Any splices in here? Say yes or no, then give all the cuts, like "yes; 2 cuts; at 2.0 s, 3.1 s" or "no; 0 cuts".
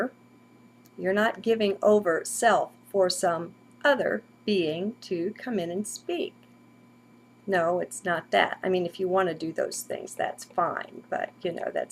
yes; 1 cut; at 9.8 s